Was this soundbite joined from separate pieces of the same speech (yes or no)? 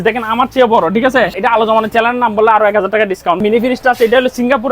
yes